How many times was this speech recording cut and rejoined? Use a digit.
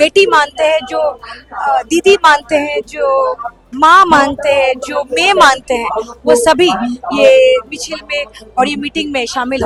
0